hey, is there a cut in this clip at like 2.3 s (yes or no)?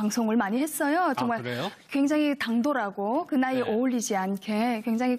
no